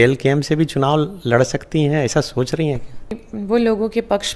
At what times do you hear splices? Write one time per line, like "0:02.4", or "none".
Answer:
0:03.3